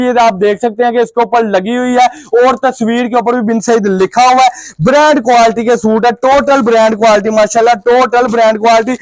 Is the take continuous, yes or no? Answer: yes